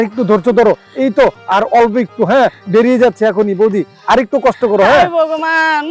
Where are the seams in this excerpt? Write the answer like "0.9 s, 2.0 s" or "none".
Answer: none